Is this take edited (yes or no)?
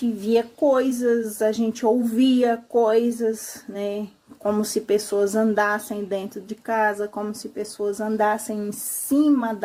no